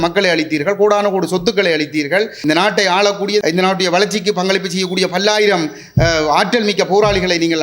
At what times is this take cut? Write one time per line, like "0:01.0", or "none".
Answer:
0:02.4
0:03.4